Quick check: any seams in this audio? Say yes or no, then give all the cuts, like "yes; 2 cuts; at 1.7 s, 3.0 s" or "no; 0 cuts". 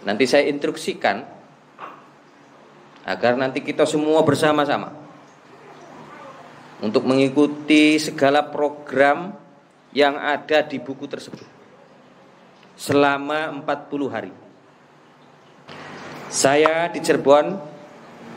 yes; 1 cut; at 15.7 s